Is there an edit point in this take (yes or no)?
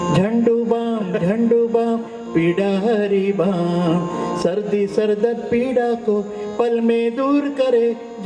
no